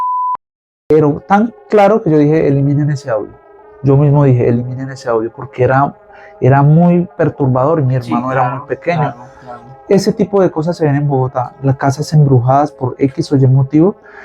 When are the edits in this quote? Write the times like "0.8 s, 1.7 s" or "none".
0.9 s